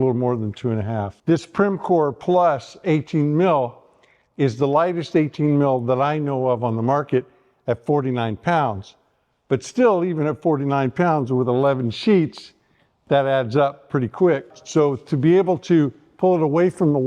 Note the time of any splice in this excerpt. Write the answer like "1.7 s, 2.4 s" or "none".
14.6 s